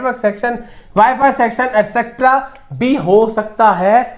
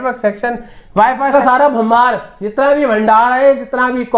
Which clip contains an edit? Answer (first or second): second